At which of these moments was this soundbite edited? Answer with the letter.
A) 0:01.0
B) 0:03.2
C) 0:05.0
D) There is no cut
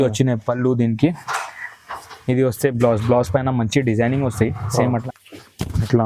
C